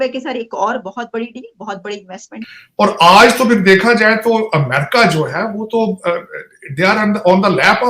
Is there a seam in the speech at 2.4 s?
yes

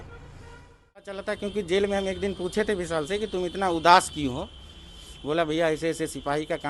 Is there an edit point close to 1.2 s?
yes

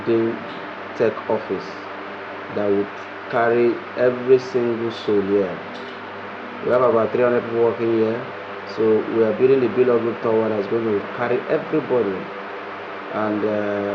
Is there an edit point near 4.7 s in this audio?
no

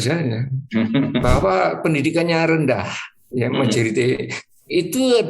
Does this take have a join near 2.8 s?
no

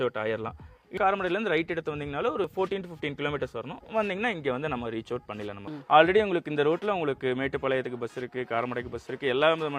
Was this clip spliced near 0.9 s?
yes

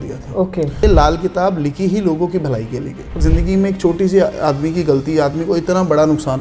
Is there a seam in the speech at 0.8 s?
yes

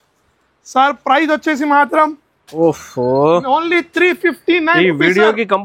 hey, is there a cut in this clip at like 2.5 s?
yes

